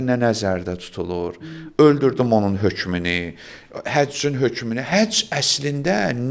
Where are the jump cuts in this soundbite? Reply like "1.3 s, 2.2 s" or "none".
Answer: none